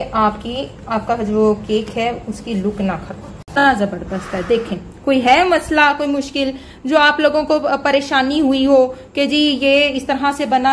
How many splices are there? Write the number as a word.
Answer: one